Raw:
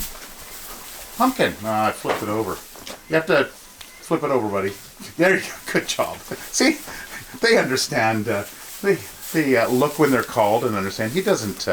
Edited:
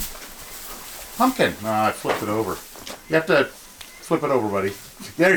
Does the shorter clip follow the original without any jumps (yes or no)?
yes